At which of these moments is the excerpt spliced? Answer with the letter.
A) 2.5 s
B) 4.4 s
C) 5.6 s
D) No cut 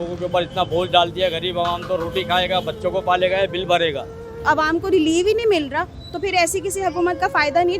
B